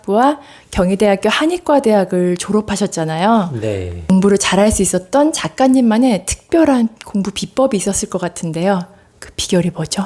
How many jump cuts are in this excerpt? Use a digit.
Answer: 0